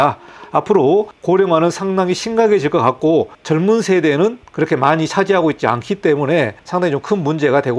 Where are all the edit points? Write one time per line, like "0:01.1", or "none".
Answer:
0:06.6